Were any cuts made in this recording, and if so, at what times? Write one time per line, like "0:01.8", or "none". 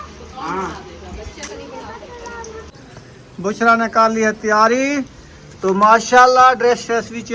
0:02.7